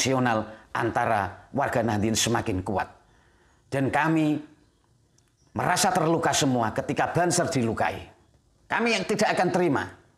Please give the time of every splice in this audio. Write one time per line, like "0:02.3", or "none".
none